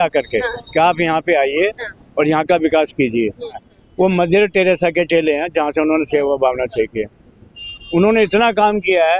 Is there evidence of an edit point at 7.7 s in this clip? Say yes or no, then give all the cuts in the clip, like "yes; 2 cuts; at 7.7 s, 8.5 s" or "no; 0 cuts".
no; 1 cut; at 3.6 s